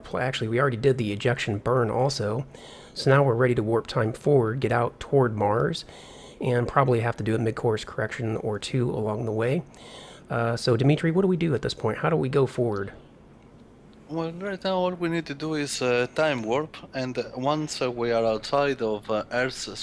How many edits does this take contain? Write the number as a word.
zero